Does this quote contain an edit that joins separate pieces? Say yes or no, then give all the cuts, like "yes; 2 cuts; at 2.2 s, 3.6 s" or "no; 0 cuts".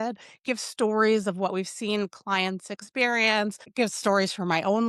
yes; 1 cut; at 3.6 s